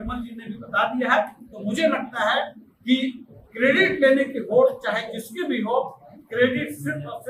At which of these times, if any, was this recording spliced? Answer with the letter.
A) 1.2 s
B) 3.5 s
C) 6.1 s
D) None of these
D